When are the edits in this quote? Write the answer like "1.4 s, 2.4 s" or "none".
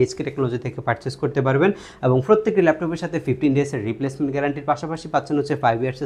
none